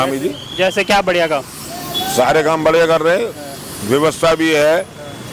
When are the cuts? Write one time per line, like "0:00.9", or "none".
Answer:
none